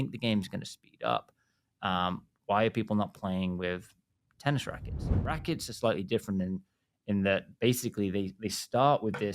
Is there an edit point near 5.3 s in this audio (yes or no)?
yes